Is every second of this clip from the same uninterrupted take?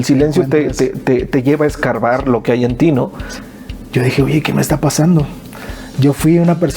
no; 1 cut; at 3.2 s

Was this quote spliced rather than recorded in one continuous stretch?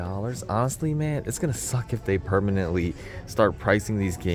no; 0 cuts

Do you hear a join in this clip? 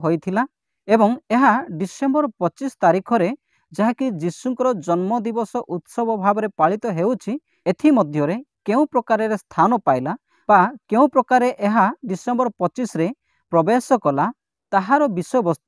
yes; 1 cut; at 13.3 s

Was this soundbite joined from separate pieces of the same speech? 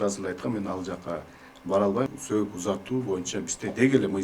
yes; 1 cut; at 2.1 s

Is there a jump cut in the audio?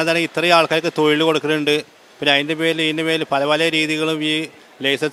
no; 0 cuts

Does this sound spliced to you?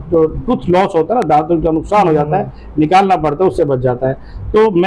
no; 0 cuts

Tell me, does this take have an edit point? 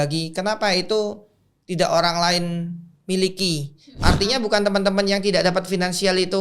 yes; 1 cut; at 4.0 s

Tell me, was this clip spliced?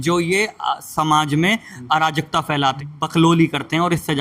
yes; 1 cut; at 2.8 s

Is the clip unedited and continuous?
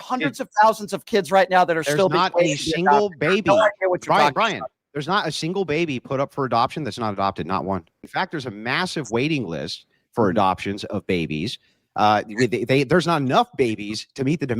no; 1 cut; at 8.0 s

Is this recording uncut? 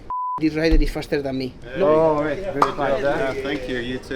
no; 1 cut; at 1.6 s

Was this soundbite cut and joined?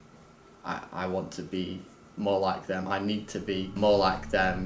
yes; 1 cut; at 3.7 s

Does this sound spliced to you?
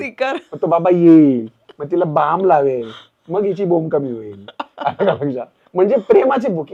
no; 0 cuts

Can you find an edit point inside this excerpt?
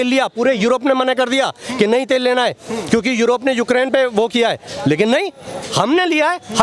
no; 0 cuts

